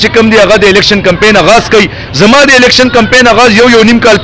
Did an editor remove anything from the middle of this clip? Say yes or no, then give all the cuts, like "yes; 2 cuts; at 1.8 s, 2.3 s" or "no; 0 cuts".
no; 0 cuts